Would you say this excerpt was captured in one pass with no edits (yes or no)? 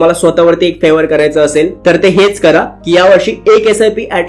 yes